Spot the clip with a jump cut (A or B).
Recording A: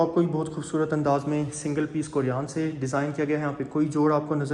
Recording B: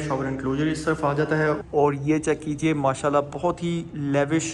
B